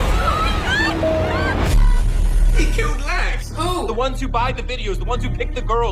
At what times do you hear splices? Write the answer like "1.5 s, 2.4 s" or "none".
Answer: 1.1 s, 2.1 s

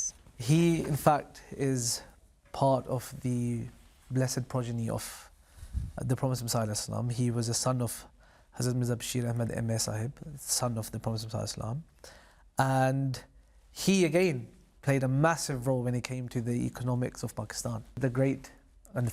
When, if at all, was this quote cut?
18.0 s

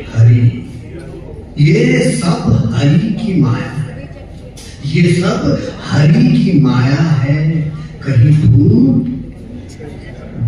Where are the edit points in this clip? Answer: none

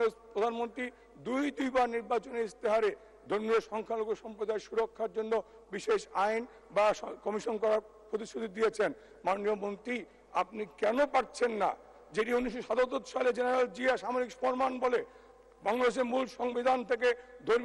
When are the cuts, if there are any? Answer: none

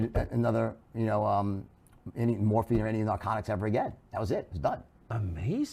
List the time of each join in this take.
none

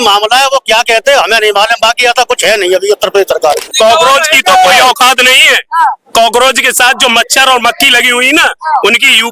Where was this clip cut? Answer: 3.7 s

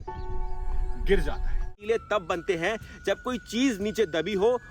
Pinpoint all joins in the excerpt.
1.8 s

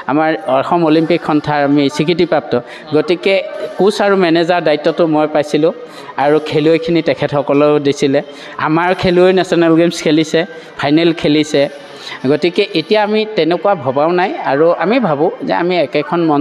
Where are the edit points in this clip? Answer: none

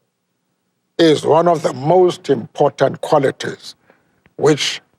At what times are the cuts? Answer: none

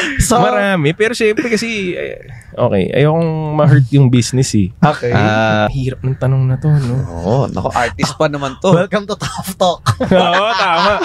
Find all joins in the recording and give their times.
5.7 s

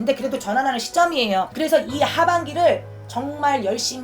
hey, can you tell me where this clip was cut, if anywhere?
1.5 s

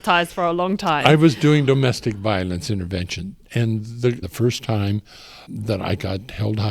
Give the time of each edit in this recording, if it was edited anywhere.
4.3 s, 5.5 s

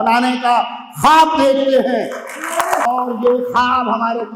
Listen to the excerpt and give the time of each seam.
2.9 s

